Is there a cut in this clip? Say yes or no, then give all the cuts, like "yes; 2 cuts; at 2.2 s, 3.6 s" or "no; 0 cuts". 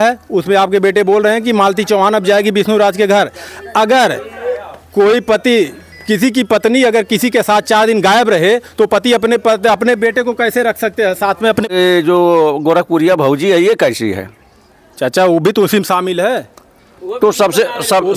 yes; 1 cut; at 11.7 s